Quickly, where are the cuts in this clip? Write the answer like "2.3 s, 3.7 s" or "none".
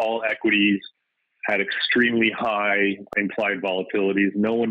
3.1 s

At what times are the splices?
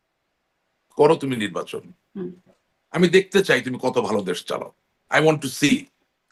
none

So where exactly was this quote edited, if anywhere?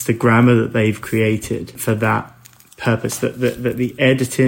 1.8 s

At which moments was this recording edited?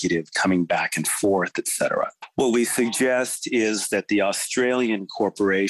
2.2 s

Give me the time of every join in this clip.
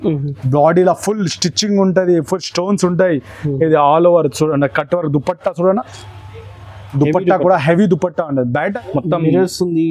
8.8 s

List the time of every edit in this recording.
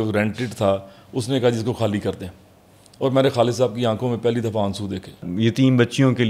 5.3 s

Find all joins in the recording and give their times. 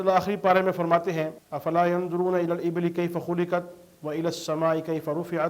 1.4 s

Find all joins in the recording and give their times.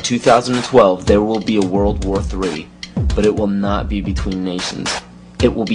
2.0 s

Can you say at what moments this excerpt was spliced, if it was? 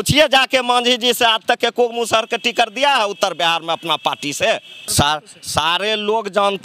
4.8 s

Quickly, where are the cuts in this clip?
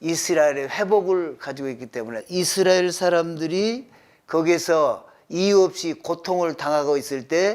2.2 s

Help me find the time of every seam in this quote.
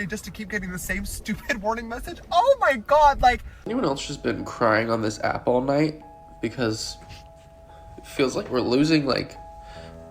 3.5 s

